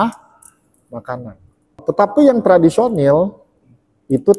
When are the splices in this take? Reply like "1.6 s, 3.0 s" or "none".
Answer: 1.8 s